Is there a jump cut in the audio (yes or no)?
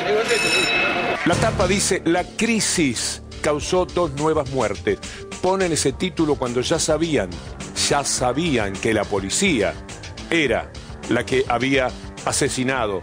yes